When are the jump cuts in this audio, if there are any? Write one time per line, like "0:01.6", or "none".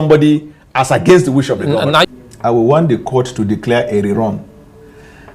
0:02.1